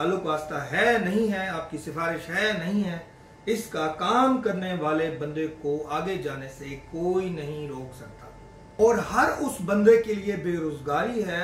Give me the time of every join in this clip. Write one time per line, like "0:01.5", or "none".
0:08.6